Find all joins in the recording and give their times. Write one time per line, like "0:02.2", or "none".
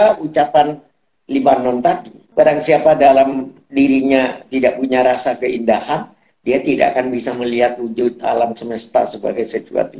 0:02.2